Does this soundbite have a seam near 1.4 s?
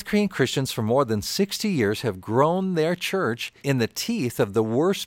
no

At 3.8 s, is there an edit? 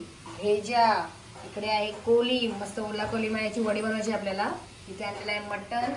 no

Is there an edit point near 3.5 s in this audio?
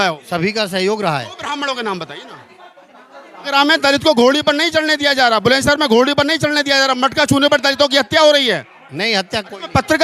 yes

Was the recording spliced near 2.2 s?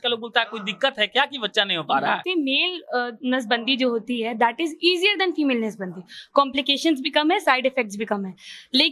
yes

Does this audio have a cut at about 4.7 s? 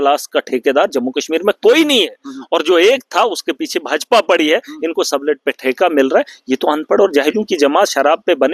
no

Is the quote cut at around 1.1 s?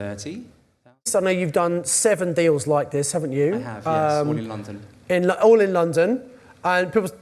yes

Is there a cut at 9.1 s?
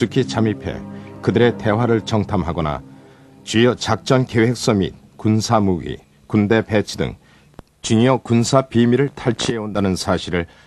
no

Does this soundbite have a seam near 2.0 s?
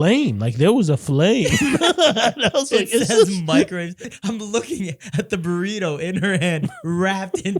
no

